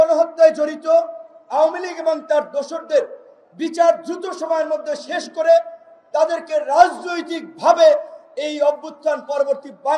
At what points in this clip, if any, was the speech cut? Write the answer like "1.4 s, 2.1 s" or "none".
none